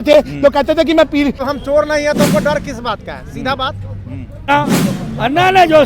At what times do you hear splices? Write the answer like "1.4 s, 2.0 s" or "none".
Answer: 1.4 s, 4.5 s